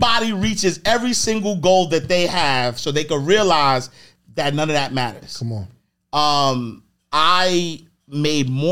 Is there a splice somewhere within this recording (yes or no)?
no